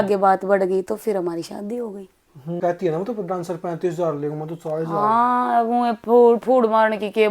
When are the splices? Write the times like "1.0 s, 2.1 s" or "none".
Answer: 2.6 s